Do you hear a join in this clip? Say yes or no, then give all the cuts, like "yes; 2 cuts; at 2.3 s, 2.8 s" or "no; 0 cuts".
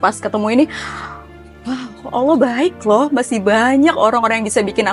no; 0 cuts